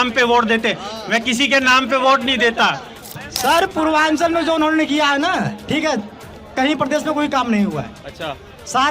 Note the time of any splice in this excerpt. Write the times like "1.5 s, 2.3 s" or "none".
3.2 s